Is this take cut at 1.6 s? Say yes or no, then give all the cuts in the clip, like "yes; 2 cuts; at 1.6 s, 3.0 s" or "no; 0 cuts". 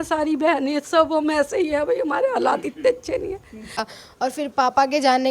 no; 1 cut; at 3.9 s